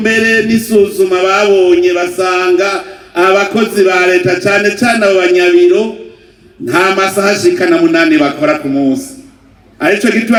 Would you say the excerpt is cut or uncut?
uncut